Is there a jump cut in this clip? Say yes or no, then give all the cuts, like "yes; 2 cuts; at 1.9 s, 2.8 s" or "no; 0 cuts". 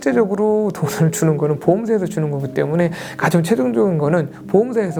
no; 0 cuts